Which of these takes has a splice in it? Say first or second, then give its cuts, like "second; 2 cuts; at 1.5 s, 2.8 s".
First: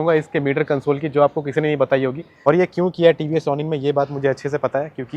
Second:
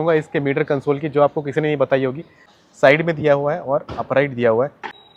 first; 1 cut; at 2.3 s